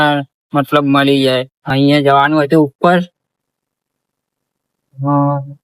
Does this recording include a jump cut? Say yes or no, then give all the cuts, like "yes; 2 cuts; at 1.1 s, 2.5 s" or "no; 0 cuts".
yes; 1 cut; at 1.6 s